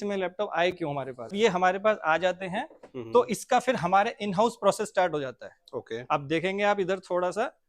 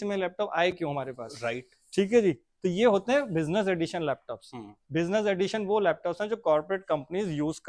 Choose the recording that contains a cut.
first; 1 cut; at 1.3 s

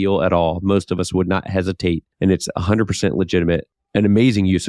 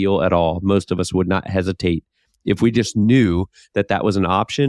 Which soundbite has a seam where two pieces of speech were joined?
first; 2 cuts; at 2.1 s, 3.8 s

